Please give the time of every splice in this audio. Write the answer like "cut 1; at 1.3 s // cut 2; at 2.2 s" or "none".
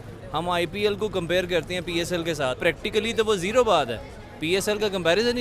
cut 1; at 2.6 s